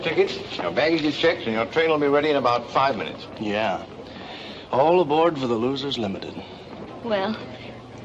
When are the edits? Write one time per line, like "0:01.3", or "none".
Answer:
0:02.0